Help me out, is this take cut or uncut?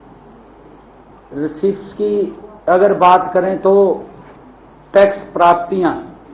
uncut